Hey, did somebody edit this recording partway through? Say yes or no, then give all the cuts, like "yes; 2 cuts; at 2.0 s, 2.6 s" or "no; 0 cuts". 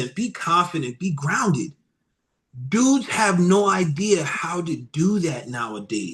no; 0 cuts